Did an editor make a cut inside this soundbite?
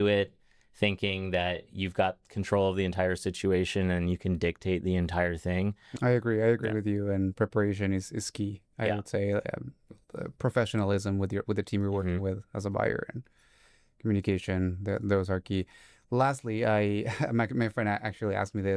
yes; 1 cut; at 5.9 s

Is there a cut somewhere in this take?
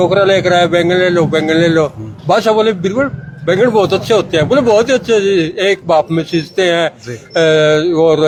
no; 0 cuts

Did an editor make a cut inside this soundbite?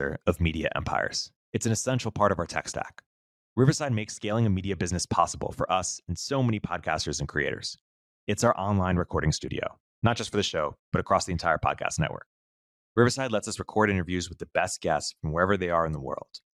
no; 0 cuts

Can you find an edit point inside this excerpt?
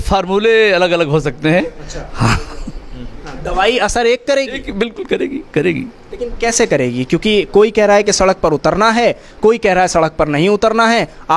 no; 0 cuts

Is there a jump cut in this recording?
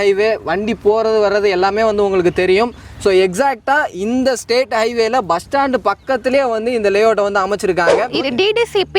yes; 1 cut; at 8.1 s

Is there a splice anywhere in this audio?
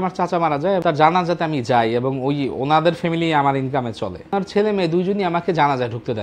yes; 2 cuts; at 0.8 s, 4.4 s

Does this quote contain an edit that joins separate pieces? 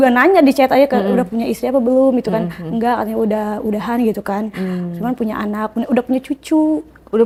no; 0 cuts

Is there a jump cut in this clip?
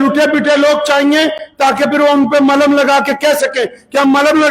no; 0 cuts

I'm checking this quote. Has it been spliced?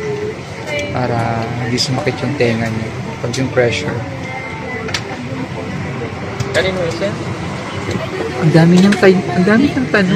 no; 0 cuts

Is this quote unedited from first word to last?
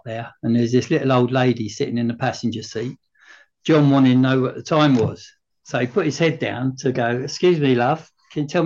yes; 0 cuts

